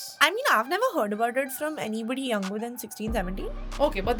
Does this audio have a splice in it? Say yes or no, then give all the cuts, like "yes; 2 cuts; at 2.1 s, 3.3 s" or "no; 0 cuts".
no; 0 cuts